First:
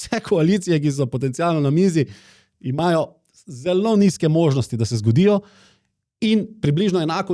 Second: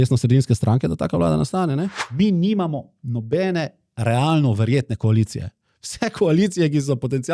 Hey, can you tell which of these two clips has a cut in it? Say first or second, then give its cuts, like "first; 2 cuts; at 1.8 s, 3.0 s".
second; 1 cut; at 2.0 s